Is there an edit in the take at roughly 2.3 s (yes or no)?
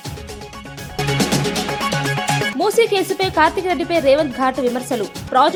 no